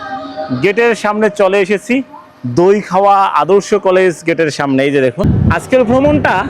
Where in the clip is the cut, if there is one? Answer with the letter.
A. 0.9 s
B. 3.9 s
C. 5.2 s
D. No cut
C